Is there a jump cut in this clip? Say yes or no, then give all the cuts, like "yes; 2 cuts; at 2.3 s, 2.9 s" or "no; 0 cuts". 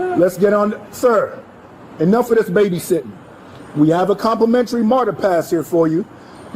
no; 0 cuts